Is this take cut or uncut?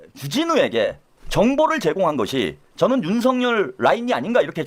uncut